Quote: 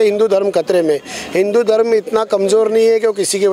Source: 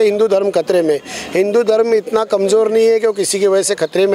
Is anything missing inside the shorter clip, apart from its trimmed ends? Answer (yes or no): no